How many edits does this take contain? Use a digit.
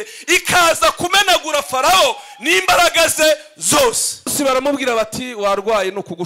1